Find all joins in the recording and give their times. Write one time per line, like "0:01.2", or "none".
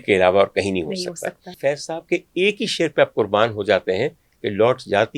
0:01.6